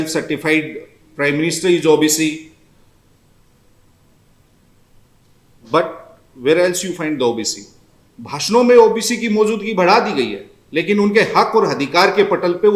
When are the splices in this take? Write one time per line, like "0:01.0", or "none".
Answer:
none

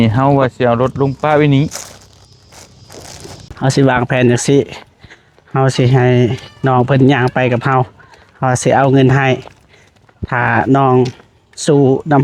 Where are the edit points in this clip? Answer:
0:03.4

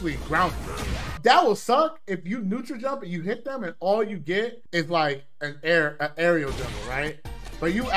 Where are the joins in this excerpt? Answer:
0:01.0

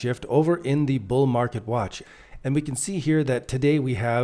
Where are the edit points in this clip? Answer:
0:02.0

